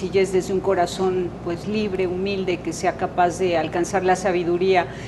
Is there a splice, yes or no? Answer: yes